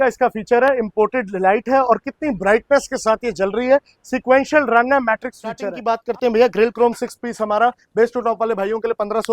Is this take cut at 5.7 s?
yes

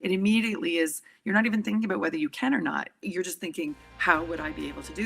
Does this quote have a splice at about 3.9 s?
yes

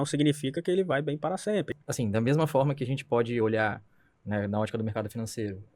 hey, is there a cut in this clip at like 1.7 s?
yes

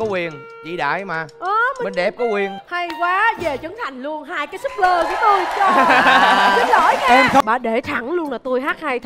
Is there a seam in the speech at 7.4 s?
yes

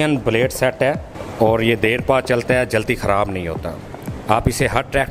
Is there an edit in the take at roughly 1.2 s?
yes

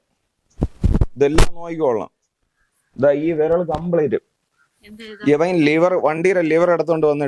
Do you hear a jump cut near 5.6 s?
no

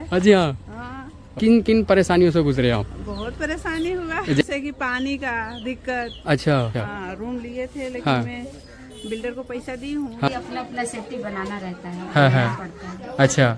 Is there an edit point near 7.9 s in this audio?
no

